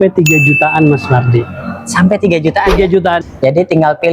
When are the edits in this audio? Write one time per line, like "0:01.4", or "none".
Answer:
0:03.2